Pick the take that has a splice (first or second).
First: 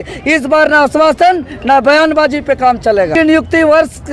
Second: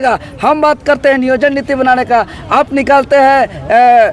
first